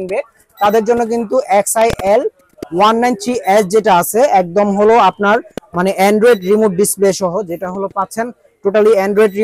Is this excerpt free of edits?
yes; 0 cuts

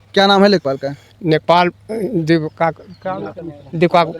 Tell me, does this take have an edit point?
no; 0 cuts

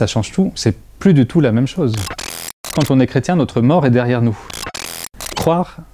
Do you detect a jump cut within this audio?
yes; 2 cuts; at 2.5 s, 4.8 s

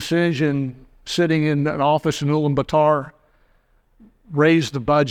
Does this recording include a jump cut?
no; 0 cuts

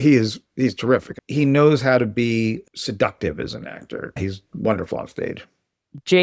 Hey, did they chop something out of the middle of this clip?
yes; 2 cuts; at 1.2 s, 4.0 s

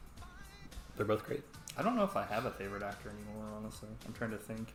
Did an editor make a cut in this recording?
no; 0 cuts

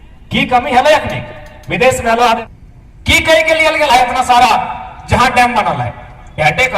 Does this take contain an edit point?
yes; 1 cut; at 2.4 s

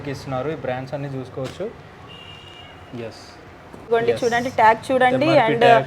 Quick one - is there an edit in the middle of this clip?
yes; 1 cut; at 3.9 s

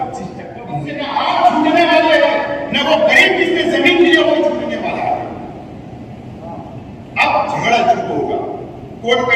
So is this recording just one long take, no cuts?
no; 1 cut; at 1.0 s

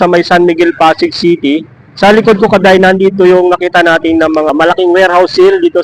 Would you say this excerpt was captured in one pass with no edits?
no; 1 cut; at 4.5 s

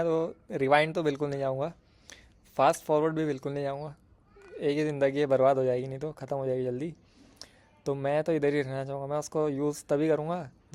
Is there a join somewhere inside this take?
no; 0 cuts

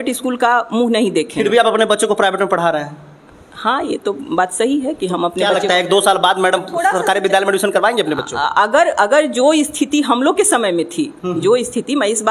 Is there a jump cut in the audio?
no; 0 cuts

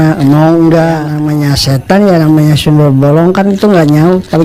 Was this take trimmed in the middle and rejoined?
yes; 1 cut; at 1.2 s

